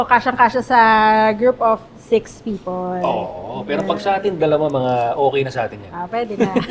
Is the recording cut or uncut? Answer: uncut